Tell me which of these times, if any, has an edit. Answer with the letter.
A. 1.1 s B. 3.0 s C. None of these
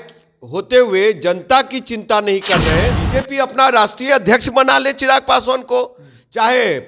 B